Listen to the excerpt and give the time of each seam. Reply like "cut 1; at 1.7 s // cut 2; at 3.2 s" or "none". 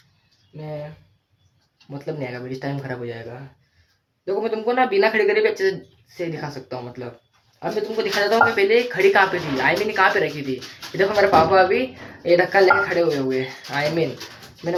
none